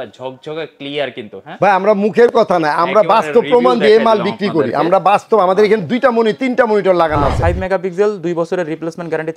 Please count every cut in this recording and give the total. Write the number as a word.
one